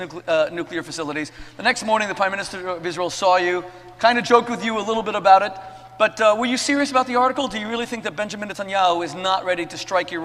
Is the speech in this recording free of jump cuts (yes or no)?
yes